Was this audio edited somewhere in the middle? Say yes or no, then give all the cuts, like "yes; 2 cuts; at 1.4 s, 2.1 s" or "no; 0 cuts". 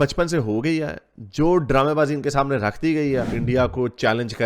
yes; 1 cut; at 3.3 s